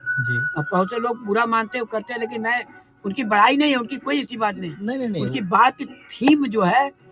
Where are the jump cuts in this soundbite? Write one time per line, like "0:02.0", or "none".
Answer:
none